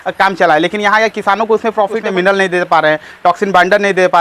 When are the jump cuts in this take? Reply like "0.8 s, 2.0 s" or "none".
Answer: 2.0 s